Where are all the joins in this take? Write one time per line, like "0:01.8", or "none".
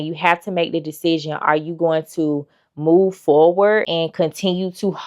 0:03.9